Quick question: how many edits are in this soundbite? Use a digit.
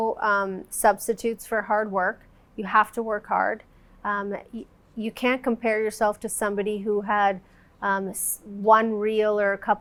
0